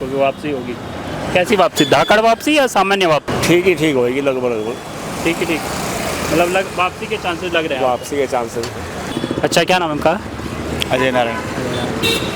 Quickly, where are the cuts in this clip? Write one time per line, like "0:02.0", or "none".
0:03.3
0:09.0